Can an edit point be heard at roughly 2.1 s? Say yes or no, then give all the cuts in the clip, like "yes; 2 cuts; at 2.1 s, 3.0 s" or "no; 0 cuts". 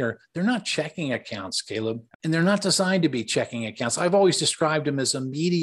yes; 1 cut; at 2.1 s